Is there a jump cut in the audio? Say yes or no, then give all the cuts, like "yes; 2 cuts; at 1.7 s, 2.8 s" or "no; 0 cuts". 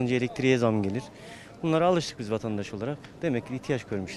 no; 0 cuts